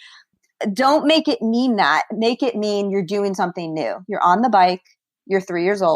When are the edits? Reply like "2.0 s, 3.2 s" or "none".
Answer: none